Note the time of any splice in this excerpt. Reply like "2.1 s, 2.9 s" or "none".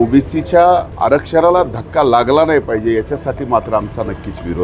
0.9 s